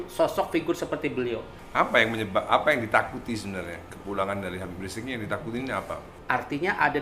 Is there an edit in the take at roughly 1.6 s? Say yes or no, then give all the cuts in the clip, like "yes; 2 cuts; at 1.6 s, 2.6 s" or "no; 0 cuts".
yes; 2 cuts; at 1.6 s, 6.1 s